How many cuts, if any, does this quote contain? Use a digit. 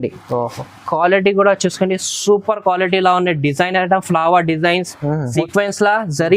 1